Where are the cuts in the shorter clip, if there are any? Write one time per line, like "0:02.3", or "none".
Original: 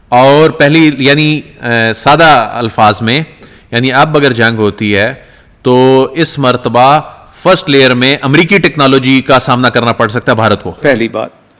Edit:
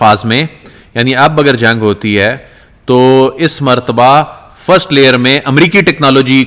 none